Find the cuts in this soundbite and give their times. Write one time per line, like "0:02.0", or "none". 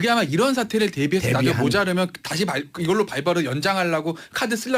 none